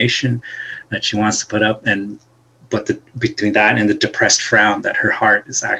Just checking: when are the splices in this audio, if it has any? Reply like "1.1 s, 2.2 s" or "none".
none